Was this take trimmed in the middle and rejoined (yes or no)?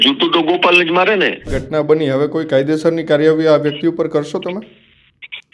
yes